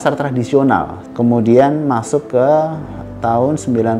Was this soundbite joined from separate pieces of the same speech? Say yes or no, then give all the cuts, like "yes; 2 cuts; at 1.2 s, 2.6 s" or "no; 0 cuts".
yes; 1 cut; at 1.0 s